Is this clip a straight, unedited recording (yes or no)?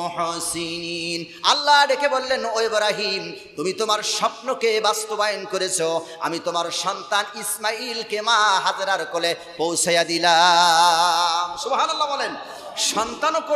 yes